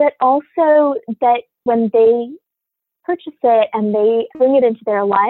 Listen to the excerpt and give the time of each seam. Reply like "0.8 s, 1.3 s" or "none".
1.6 s, 4.3 s